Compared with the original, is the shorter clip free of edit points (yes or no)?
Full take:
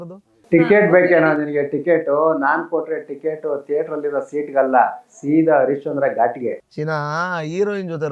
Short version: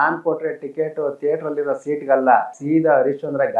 no